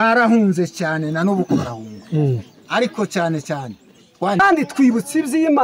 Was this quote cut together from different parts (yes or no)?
yes